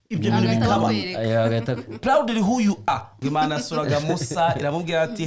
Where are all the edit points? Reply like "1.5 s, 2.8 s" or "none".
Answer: 3.1 s

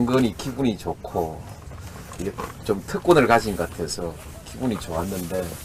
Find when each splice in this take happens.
none

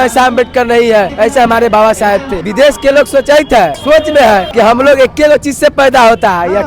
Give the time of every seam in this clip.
1.1 s, 2.4 s, 3.8 s, 4.5 s

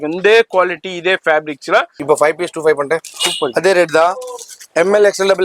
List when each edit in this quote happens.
1.9 s

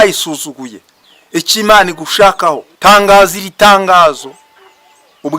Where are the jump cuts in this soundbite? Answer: 2.7 s

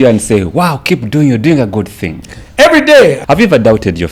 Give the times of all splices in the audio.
3.2 s

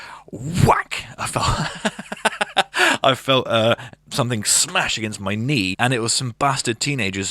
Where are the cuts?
5.7 s

